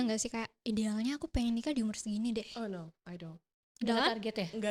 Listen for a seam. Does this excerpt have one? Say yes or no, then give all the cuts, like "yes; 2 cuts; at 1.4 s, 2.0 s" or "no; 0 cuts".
no; 0 cuts